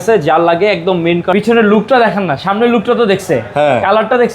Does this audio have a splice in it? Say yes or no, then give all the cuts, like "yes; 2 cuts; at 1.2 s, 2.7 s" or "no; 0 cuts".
yes; 1 cut; at 1.3 s